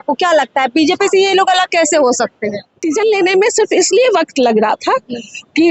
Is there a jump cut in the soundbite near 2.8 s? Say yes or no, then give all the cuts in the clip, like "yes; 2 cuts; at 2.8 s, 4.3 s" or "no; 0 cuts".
yes; 1 cut; at 2.8 s